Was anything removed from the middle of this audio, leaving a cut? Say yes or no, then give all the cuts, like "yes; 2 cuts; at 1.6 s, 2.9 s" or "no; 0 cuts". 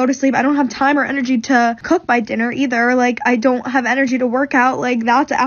yes; 1 cut; at 1.8 s